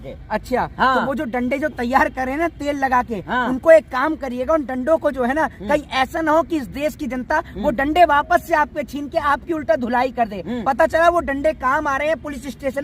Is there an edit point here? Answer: no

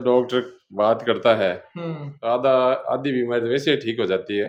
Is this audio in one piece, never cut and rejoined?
yes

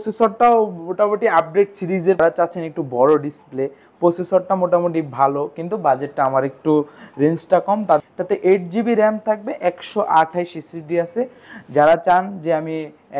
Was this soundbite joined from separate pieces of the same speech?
yes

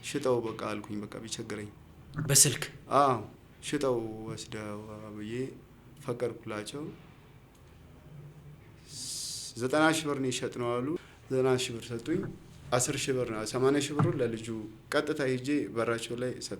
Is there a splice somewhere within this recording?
yes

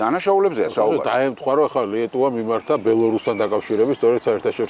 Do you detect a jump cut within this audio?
no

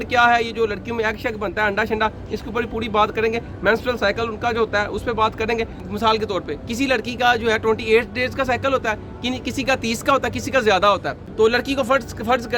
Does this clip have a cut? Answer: yes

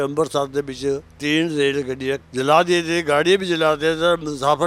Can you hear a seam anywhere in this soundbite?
yes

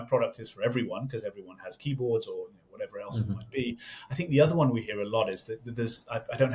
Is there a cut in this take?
no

